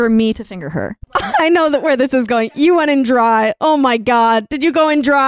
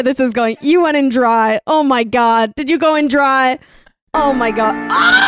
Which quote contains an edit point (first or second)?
first